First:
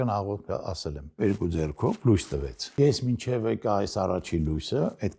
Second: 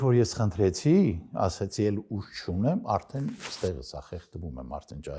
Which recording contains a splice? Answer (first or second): first